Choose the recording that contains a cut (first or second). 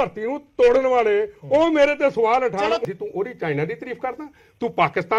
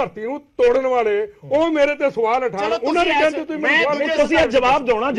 first